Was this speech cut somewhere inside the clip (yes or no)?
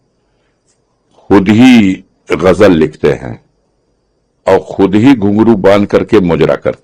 no